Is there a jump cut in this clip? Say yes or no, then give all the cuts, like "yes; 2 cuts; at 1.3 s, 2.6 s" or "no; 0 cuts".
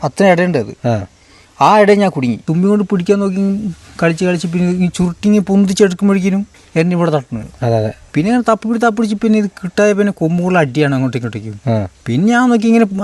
yes; 4 cuts; at 2.4 s, 6.6 s, 8.0 s, 11.9 s